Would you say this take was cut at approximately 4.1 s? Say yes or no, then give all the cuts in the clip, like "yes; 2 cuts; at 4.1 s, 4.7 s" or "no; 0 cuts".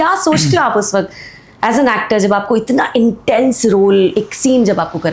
yes; 1 cut; at 4.1 s